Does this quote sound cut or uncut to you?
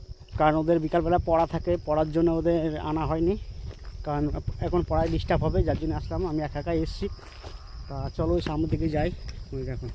uncut